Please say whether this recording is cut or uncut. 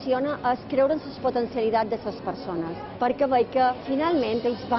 uncut